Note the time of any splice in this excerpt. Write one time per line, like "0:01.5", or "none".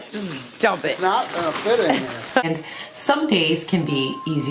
0:02.4

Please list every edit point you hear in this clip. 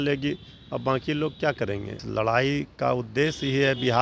0:02.0

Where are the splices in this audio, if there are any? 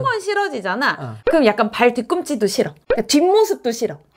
none

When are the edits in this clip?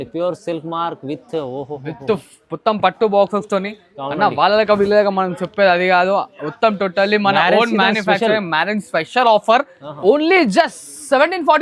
0:09.8

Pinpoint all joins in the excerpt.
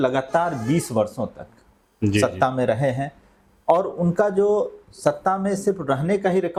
none

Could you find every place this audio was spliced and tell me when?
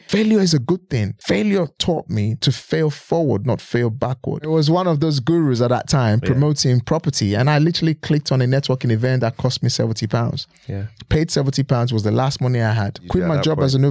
0:01.1
0:02.4
0:04.5
0:13.0

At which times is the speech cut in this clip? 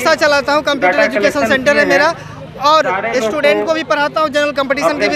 none

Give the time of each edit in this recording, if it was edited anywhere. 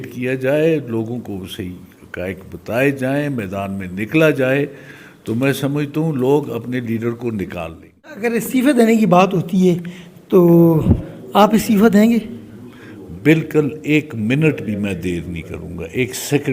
0:08.2

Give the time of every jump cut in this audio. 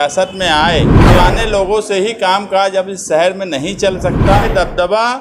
0:01.0
0:04.5

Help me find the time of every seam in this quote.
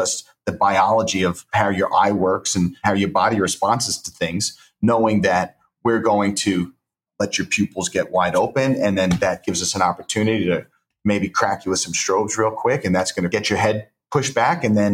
0:01.4
0:02.8
0:07.0
0:13.3

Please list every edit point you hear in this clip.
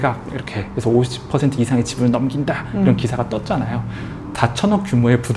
0:04.3

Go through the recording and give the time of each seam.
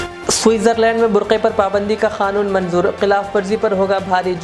none

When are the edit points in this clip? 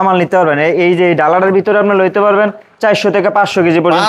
none

